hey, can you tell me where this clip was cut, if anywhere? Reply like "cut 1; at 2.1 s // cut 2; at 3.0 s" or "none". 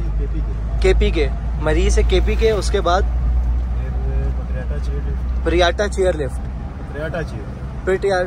none